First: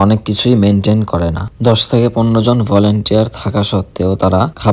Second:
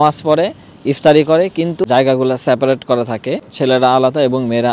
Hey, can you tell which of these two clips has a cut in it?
second; 1 cut; at 1.8 s

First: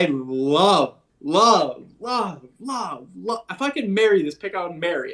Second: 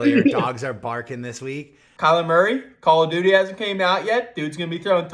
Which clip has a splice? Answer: second; 1 cut; at 1.8 s

